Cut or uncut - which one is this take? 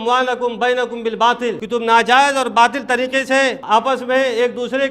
cut